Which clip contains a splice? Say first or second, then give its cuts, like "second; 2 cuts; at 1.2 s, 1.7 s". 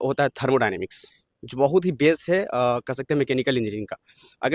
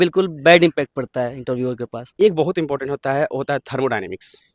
second; 1 cut; at 2.0 s